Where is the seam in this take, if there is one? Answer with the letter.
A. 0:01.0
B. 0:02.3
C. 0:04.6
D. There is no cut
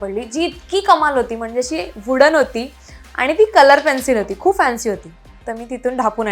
D